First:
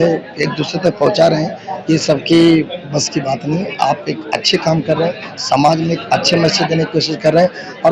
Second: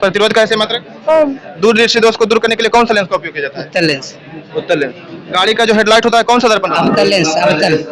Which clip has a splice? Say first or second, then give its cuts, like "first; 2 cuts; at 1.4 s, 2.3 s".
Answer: second; 1 cut; at 1.6 s